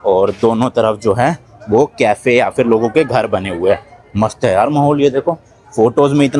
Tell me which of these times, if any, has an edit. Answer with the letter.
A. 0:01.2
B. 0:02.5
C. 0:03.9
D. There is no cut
D